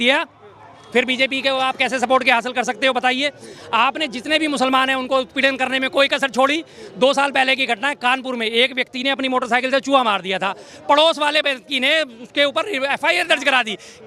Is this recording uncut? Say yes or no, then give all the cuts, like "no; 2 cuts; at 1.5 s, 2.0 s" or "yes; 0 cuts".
yes; 0 cuts